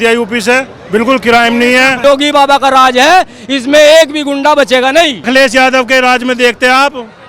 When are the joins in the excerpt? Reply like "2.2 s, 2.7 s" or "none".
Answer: 2.0 s, 5.3 s